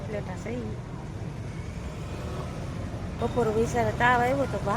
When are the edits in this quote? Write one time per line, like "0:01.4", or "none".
0:03.1